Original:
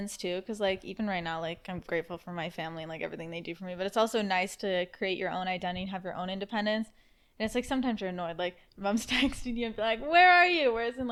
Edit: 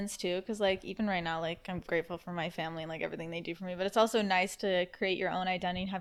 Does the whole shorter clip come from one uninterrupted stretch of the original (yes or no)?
yes